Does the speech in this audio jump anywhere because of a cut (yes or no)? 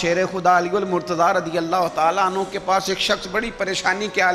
no